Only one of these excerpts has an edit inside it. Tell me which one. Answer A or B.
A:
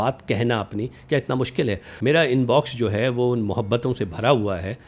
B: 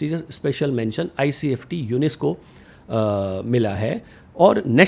A